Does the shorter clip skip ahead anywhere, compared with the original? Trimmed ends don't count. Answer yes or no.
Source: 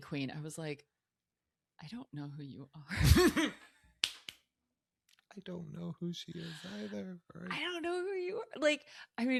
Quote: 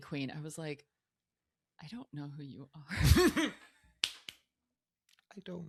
no